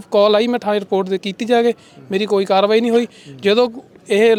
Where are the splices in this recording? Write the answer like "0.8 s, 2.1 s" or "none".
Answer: none